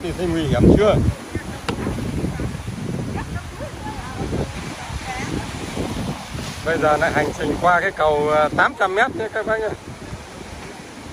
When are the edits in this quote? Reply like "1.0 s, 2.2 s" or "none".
none